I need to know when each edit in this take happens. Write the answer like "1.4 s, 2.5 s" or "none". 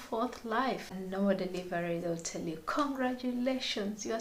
1.0 s